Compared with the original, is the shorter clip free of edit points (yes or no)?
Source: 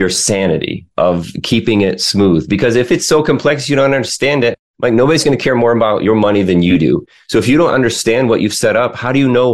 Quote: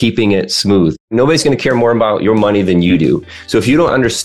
no